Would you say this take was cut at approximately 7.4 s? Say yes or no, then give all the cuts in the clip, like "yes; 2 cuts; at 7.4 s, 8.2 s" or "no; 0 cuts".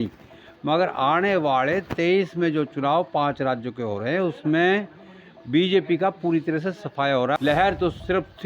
yes; 1 cut; at 7.4 s